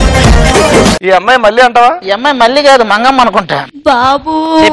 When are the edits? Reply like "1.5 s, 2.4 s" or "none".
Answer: 1.0 s, 2.1 s, 3.5 s